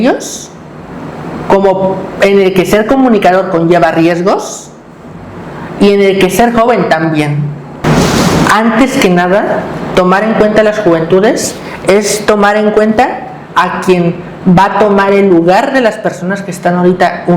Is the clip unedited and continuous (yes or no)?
no